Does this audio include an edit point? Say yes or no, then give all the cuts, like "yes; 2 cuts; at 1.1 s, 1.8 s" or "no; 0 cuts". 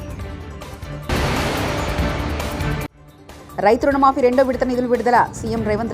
yes; 1 cut; at 1.1 s